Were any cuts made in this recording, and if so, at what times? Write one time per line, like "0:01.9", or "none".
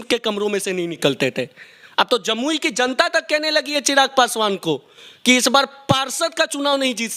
none